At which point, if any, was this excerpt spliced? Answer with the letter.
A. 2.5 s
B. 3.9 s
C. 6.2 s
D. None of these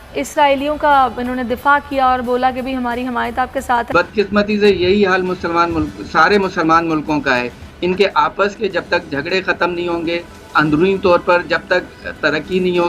B